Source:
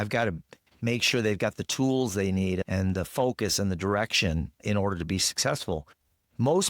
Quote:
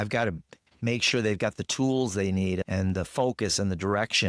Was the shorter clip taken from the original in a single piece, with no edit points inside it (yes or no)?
yes